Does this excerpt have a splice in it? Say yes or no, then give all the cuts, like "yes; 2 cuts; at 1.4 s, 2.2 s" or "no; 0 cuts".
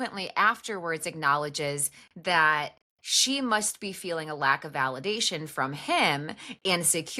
no; 0 cuts